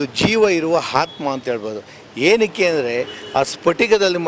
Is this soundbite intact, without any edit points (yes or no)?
yes